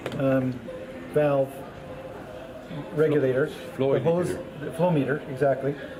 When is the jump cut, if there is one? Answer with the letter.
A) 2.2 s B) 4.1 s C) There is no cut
C